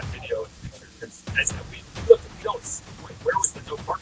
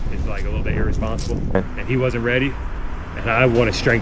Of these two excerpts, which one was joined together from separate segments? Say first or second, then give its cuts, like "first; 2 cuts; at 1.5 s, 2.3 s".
second; 1 cut; at 1.6 s